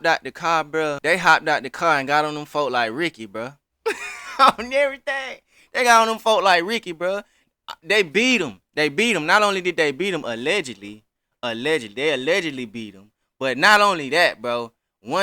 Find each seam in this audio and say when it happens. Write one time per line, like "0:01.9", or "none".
0:01.0